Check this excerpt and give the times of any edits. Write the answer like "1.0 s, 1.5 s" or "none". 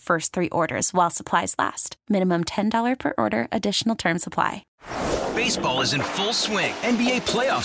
4.6 s